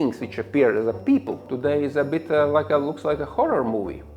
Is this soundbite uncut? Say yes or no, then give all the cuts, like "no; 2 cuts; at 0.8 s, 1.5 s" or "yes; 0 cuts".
no; 1 cut; at 1.5 s